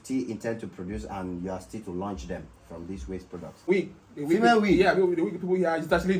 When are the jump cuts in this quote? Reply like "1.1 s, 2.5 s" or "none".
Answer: 3.7 s